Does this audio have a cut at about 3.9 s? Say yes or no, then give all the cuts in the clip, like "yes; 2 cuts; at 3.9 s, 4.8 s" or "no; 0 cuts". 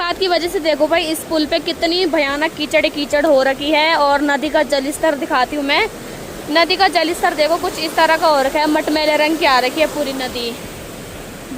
no; 0 cuts